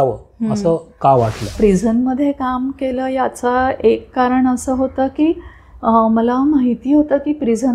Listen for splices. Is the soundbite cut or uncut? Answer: cut